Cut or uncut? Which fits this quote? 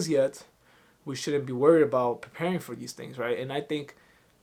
uncut